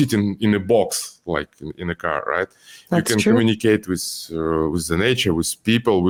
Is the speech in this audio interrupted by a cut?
no; 0 cuts

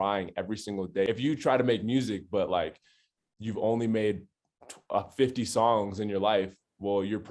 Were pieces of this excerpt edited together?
yes; 1 cut; at 1.1 s

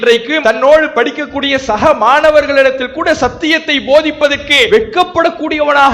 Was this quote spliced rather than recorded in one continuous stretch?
yes; 1 cut; at 4.7 s

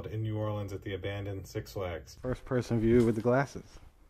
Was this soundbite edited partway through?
yes; 1 cut; at 2.2 s

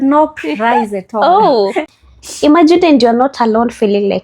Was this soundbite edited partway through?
yes; 1 cut; at 1.8 s

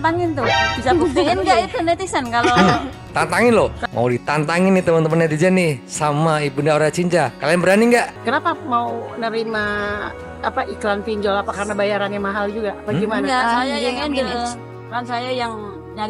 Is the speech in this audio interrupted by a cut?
yes; 2 cuts; at 3.8 s, 8.1 s

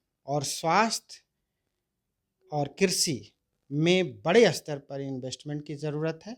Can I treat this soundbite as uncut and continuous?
yes; 0 cuts

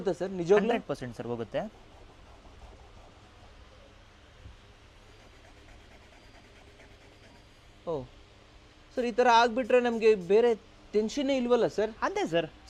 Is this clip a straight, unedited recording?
yes; 0 cuts

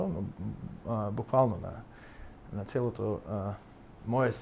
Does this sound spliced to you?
no; 0 cuts

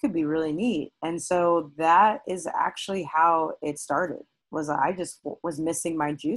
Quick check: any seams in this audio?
no; 0 cuts

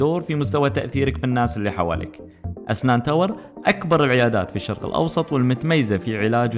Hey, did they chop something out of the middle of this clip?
no; 0 cuts

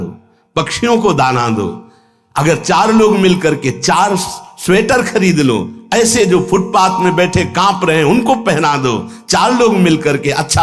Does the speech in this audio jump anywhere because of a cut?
no; 0 cuts

